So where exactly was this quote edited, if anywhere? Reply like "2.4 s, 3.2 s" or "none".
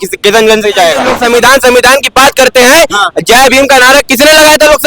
1.1 s